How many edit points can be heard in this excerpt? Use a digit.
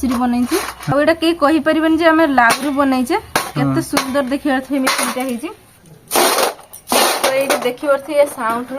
1